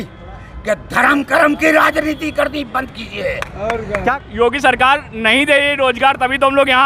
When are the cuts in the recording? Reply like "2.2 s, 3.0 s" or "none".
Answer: 4.1 s